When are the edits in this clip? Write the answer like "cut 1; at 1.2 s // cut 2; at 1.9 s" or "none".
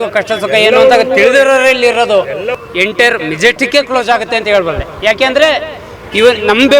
cut 1; at 2.5 s

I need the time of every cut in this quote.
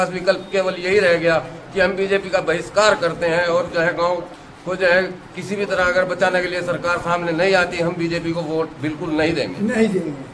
none

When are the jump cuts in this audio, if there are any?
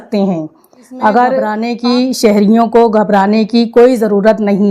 cut 1; at 1.6 s

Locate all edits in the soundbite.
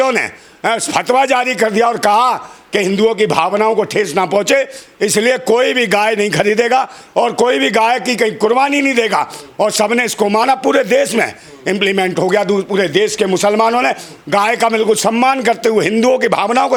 none

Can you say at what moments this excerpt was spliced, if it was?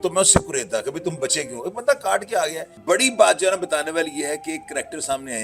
cut 1; at 2.7 s

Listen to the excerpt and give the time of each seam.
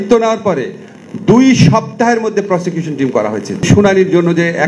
cut 1; at 3.7 s

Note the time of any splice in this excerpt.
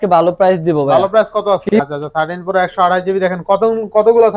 cut 1; at 1.7 s

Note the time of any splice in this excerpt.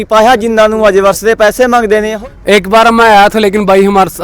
cut 1; at 2.1 s

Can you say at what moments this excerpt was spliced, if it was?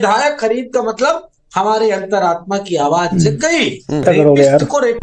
cut 1; at 4.0 s

